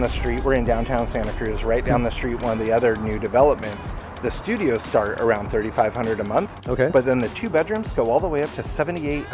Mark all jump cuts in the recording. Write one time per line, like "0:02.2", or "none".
none